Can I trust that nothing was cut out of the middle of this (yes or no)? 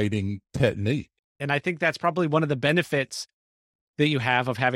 no